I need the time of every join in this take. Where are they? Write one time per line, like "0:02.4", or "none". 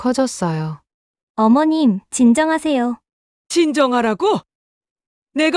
none